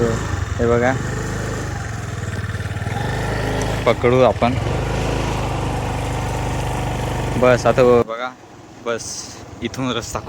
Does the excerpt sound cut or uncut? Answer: cut